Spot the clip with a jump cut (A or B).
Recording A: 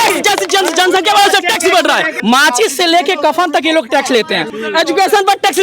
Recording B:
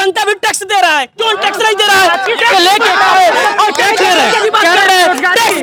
A